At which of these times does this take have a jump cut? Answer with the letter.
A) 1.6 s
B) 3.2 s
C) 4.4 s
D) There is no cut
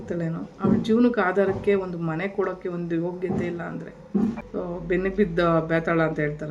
C